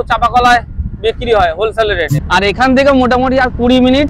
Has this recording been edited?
yes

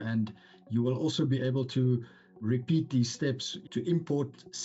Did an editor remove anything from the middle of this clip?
yes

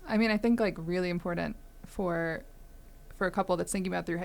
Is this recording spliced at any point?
no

